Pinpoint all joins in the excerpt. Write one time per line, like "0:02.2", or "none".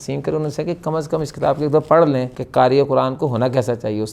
0:02.4